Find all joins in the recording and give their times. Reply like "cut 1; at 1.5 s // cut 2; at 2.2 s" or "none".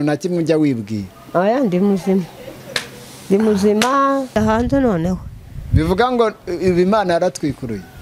cut 1; at 4.4 s